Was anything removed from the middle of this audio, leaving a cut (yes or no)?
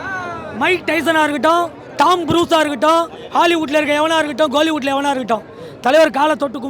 no